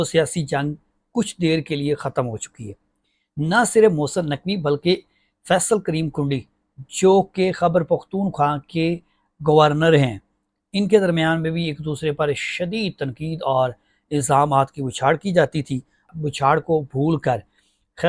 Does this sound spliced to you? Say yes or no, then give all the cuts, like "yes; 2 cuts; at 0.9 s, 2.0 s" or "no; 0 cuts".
no; 0 cuts